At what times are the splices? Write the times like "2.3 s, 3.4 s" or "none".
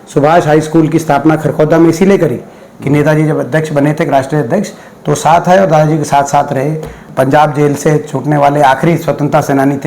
7.0 s